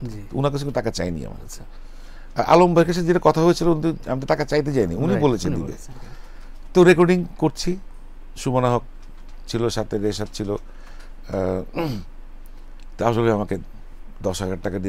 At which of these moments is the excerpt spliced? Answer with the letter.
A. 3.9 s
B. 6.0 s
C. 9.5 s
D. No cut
D